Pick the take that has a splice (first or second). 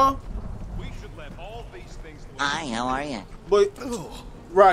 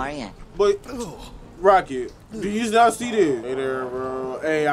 second